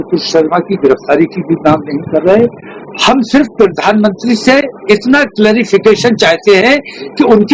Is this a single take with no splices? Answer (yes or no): yes